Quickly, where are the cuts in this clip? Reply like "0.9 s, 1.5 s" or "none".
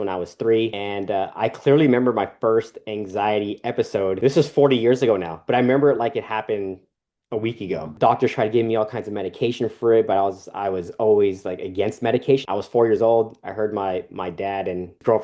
7.9 s, 12.4 s